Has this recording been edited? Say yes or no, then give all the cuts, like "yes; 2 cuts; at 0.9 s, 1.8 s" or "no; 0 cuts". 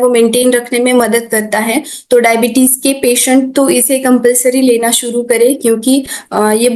no; 0 cuts